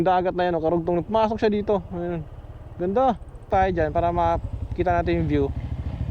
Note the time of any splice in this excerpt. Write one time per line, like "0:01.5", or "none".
0:03.5